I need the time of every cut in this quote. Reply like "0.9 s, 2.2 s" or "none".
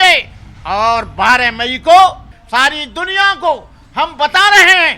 2.3 s